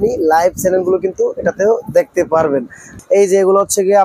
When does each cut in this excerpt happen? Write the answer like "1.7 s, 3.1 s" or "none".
2.8 s